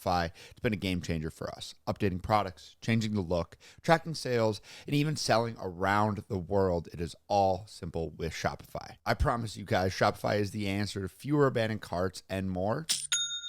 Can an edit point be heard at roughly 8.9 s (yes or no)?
yes